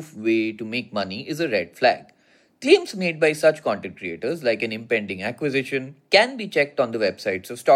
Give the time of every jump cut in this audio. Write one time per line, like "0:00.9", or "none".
0:06.0